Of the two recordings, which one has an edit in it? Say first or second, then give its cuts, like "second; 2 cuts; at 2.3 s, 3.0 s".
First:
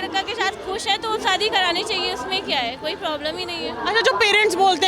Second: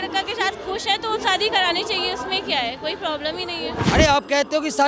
second; 1 cut; at 3.8 s